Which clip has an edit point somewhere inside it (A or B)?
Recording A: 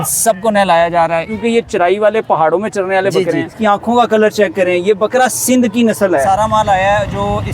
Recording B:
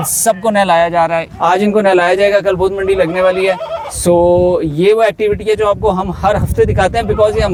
A